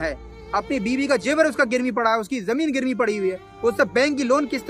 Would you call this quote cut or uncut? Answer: uncut